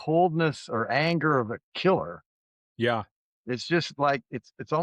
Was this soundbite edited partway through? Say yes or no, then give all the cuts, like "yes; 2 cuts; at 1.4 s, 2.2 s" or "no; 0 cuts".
no; 0 cuts